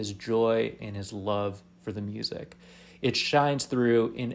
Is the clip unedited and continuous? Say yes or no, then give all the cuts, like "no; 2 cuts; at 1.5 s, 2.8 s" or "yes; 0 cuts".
yes; 0 cuts